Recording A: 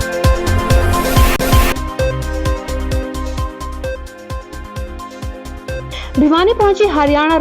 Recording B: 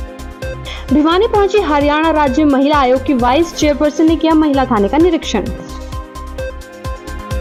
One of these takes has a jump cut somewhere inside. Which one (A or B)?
A